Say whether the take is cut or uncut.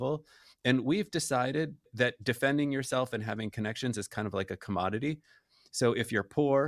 uncut